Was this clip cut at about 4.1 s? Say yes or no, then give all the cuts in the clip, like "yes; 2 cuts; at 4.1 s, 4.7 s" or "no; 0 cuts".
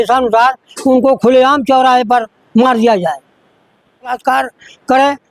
yes; 1 cut; at 4.1 s